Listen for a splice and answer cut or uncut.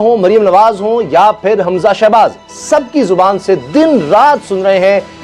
uncut